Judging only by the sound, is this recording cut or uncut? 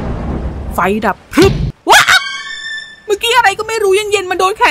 cut